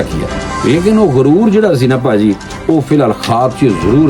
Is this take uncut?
yes; 0 cuts

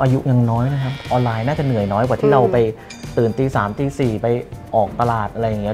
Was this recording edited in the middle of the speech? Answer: yes; 1 cut; at 1.0 s

